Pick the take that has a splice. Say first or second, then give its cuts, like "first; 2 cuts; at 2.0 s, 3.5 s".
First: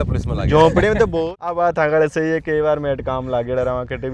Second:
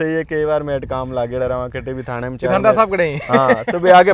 first; 1 cut; at 1.1 s